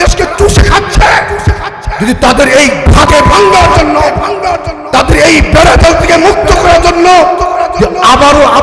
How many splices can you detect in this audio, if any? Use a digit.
1